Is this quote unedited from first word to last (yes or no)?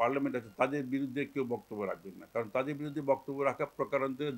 yes